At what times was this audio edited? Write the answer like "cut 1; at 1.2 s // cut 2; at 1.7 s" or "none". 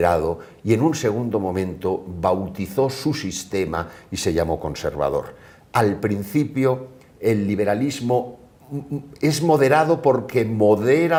none